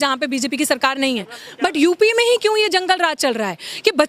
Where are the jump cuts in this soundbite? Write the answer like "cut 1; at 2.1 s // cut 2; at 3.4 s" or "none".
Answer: cut 1; at 1.4 s